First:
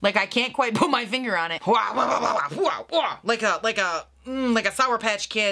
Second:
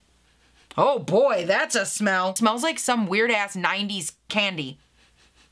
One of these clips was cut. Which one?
first; 1 cut; at 1.5 s

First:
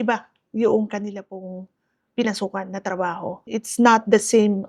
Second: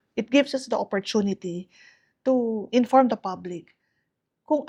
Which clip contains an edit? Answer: first; 1 cut; at 3.4 s

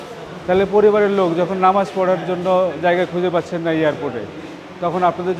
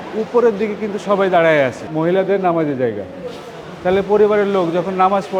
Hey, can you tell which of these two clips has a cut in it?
second; 1 cut; at 1.8 s

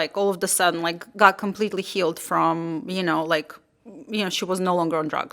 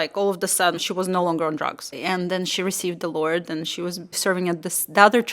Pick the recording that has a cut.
second; 3 cuts; at 0.8 s, 2.0 s, 4.2 s

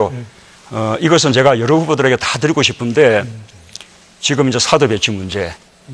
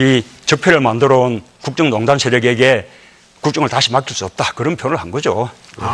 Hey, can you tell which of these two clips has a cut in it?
second; 1 cut; at 3.7 s

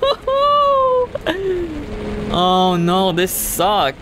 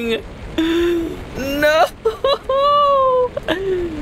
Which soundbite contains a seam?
second; 1 cut; at 1.3 s

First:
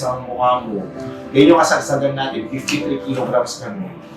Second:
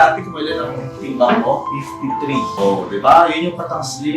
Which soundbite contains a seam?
second; 1 cut; at 2.5 s

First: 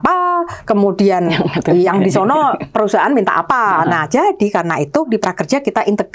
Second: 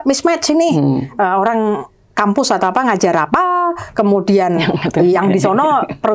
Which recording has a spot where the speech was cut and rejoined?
first; 1 cut; at 5.1 s

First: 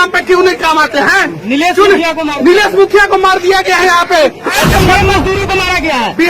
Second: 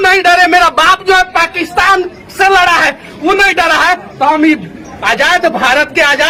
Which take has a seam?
first; 1 cut; at 4.6 s

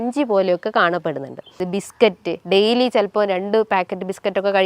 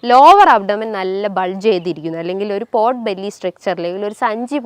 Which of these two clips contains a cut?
first; 1 cut; at 1.6 s

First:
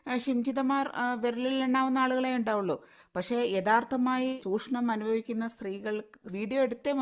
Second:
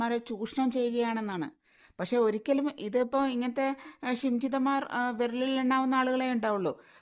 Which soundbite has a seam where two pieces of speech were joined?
first; 1 cut; at 4.4 s

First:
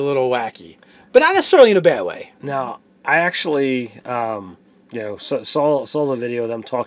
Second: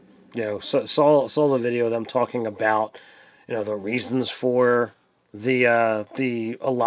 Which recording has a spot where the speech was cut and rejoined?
first; 1 cut; at 1.3 s

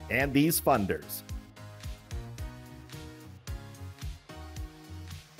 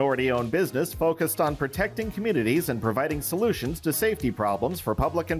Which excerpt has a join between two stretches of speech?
first; 1 cut; at 1.0 s

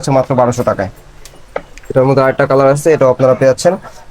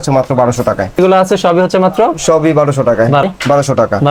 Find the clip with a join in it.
second; 2 cuts; at 1.0 s, 3.2 s

